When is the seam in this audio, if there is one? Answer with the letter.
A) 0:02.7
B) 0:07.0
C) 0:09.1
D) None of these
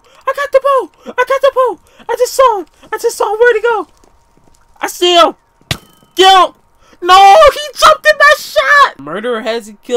C